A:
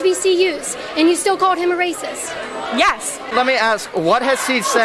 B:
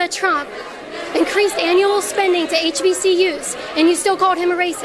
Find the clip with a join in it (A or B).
A